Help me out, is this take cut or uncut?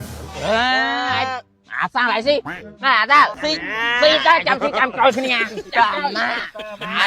cut